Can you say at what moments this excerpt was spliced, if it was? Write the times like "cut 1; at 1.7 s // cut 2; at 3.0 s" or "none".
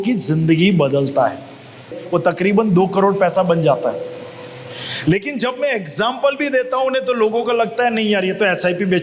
cut 1; at 2.0 s